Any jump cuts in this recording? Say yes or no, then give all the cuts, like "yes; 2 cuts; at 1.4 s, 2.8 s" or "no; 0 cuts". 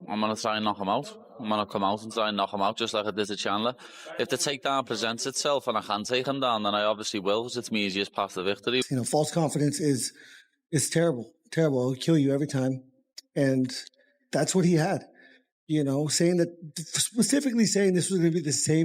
yes; 1 cut; at 8.8 s